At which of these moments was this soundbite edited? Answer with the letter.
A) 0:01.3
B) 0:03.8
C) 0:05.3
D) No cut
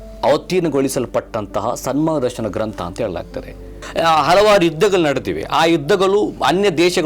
B